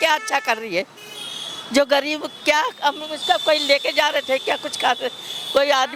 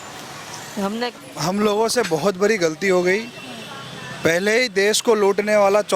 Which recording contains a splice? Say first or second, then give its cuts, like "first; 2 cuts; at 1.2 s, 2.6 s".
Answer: second; 1 cut; at 1.2 s